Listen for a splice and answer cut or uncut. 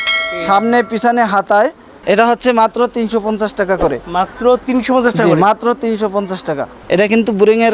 cut